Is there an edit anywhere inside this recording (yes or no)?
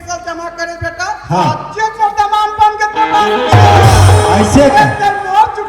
no